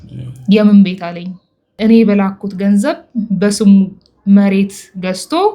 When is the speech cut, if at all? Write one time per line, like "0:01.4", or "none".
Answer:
0:01.7